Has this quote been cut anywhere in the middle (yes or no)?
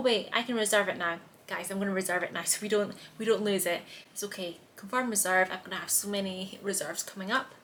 no